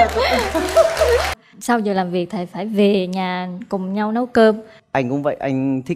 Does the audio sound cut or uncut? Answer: cut